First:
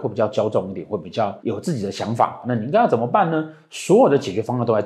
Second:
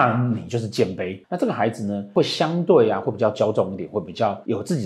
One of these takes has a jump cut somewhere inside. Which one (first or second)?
second